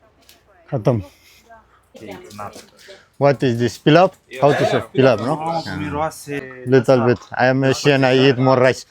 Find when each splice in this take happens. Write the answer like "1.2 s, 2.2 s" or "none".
1.9 s, 6.5 s

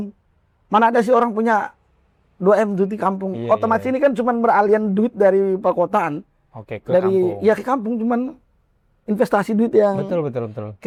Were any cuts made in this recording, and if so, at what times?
none

